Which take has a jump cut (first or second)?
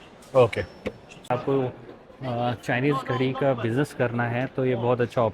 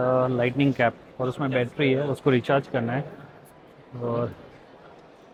first